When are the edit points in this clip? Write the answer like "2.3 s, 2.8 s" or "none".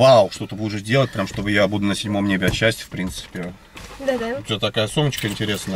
3.7 s